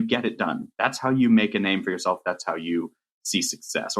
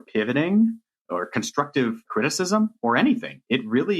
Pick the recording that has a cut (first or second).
second